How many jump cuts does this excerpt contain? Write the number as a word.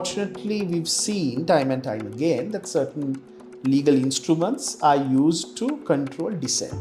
zero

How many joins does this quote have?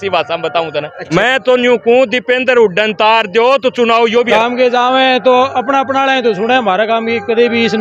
two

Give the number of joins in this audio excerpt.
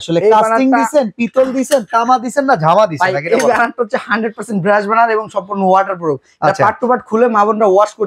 zero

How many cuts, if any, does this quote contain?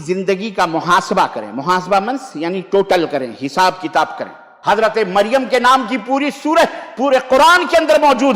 one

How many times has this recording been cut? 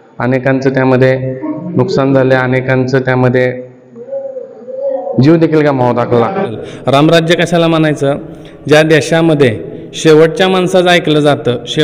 one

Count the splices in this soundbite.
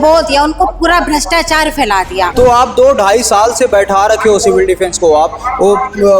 one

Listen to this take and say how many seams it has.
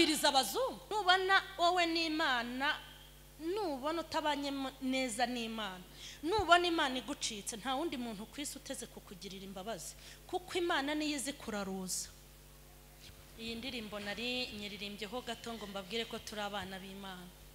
two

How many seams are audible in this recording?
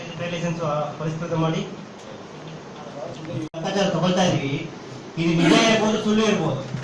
one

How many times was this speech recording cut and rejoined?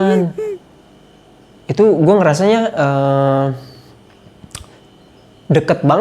zero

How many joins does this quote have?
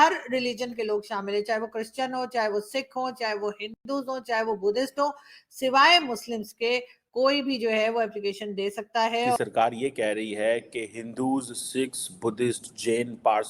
one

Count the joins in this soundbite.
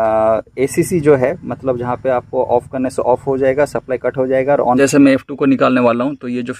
one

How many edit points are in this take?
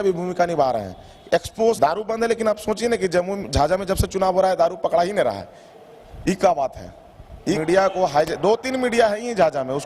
two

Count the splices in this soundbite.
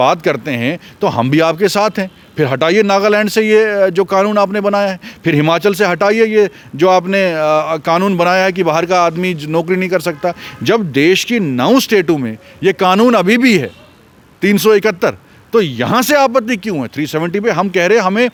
zero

